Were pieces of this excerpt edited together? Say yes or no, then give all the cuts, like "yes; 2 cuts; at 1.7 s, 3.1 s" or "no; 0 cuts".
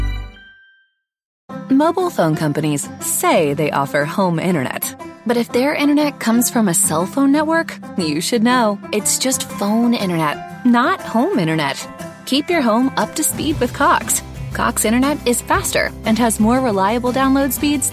yes; 1 cut; at 1.4 s